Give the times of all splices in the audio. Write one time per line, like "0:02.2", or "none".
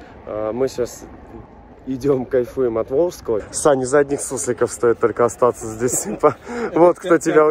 0:03.4